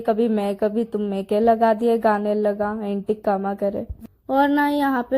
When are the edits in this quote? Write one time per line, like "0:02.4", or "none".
0:04.0

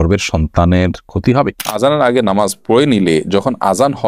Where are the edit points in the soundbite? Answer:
0:01.7

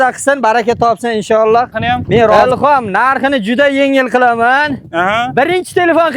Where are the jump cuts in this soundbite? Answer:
0:02.3

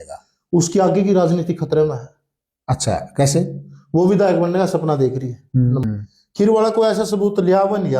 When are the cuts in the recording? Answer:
0:05.8

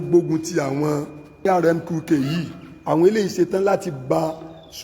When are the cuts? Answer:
0:01.5

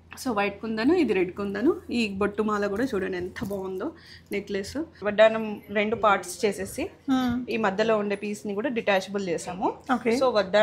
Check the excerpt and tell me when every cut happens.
0:05.0

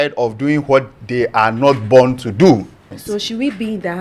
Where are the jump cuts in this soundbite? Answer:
0:03.0

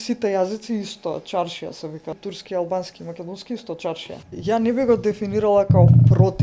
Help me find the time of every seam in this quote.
0:02.2
0:04.2

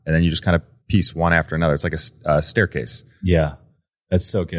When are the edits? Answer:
none

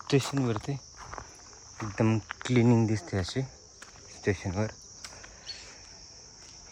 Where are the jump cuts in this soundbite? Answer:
none

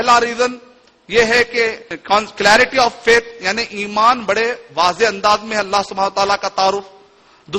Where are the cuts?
0:01.9

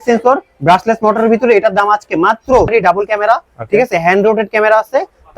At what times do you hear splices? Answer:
0:02.7

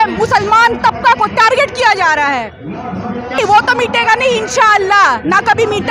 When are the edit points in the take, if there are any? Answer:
none

